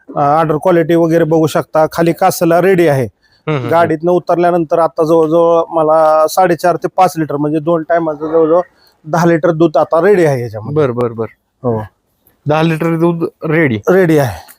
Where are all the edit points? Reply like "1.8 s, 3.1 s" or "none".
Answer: none